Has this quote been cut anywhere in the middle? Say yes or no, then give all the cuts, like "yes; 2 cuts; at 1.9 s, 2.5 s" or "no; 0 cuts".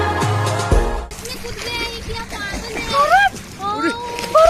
yes; 1 cut; at 1.1 s